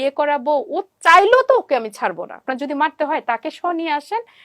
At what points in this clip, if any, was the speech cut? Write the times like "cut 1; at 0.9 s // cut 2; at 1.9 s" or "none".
cut 1; at 2.4 s